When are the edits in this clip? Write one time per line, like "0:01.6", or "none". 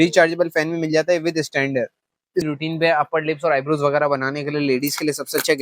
0:02.4